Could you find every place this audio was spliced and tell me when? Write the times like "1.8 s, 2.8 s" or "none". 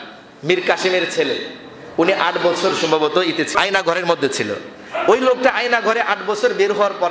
3.5 s